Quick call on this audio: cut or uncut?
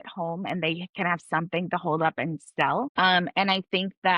cut